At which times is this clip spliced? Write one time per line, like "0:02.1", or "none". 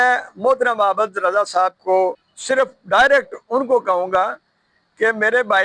0:02.3